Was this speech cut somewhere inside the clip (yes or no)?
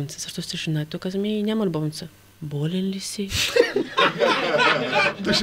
no